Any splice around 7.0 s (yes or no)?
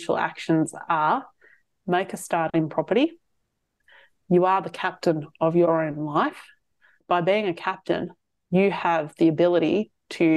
yes